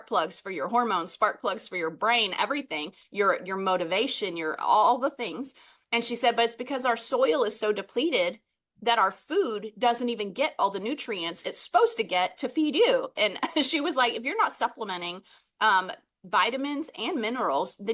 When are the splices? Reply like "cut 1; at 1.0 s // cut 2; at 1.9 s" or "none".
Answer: none